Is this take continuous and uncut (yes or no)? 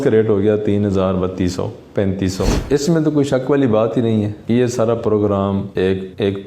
no